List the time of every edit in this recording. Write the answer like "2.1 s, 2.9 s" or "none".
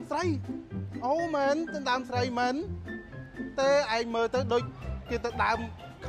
none

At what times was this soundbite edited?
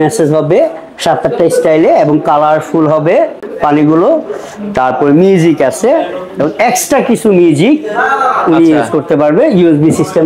none

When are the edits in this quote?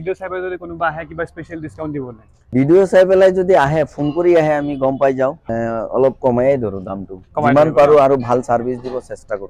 2.5 s, 5.4 s

